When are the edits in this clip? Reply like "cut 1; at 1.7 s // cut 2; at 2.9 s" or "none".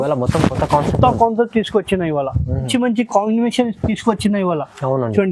cut 1; at 2.7 s